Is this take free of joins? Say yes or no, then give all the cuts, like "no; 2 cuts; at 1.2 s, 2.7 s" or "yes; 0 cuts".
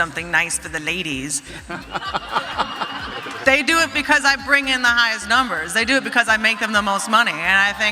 yes; 0 cuts